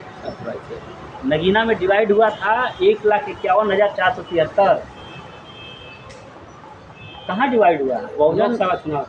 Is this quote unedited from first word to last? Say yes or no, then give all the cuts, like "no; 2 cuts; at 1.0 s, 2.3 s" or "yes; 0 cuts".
yes; 0 cuts